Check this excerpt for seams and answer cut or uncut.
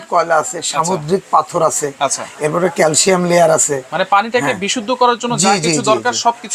uncut